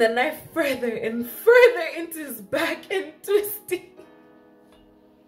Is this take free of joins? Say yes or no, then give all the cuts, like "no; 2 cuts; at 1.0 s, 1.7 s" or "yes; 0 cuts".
yes; 0 cuts